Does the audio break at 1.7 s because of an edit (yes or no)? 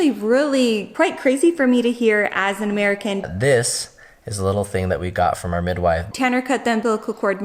no